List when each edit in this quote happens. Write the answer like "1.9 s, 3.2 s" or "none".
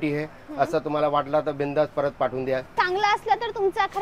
2.7 s